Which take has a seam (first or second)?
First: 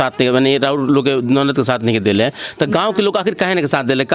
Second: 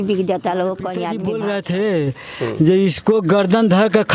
second